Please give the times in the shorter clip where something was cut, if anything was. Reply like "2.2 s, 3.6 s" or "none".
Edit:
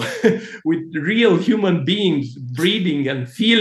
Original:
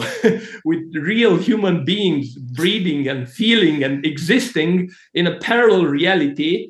none